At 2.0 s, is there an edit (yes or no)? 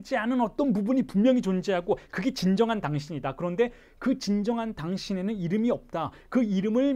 no